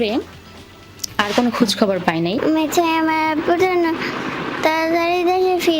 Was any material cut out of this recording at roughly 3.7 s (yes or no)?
no